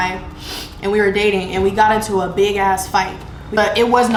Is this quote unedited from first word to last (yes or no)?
yes